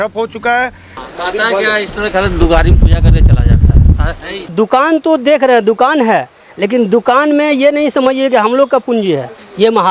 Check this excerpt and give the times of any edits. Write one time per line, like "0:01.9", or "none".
0:01.0
0:04.5